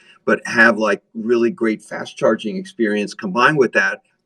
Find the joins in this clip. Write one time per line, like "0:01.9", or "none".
none

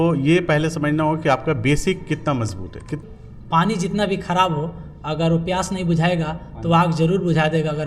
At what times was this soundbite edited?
0:03.0

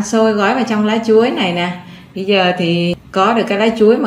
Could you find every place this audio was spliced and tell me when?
0:03.0

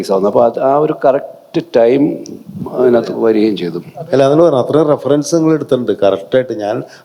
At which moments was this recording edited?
none

